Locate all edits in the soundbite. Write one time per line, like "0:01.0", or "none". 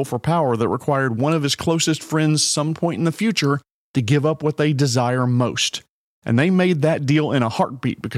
none